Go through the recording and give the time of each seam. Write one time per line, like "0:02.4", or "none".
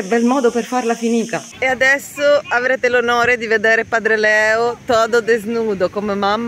0:01.5